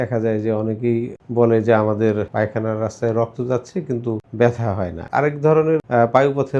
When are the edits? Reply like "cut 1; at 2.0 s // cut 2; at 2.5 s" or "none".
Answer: cut 1; at 1.2 s // cut 2; at 2.3 s // cut 3; at 4.3 s // cut 4; at 5.0 s // cut 5; at 5.8 s